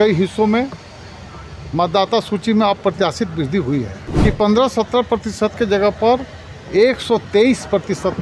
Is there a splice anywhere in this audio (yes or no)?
yes